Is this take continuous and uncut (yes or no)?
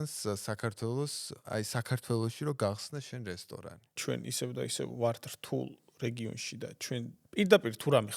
no